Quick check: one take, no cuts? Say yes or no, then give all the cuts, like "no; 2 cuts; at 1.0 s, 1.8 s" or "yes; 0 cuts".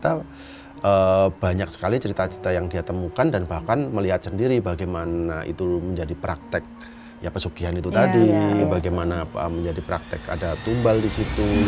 yes; 0 cuts